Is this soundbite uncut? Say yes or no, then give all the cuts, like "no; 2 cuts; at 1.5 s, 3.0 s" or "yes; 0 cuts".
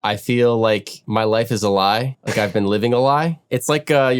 no; 3 cuts; at 0.9 s, 2.2 s, 3.4 s